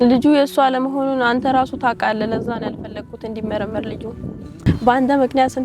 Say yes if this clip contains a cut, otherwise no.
yes